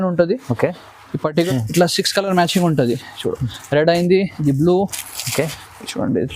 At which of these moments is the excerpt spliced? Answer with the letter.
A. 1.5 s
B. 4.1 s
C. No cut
A